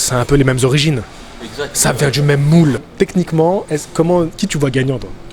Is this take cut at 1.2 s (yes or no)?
no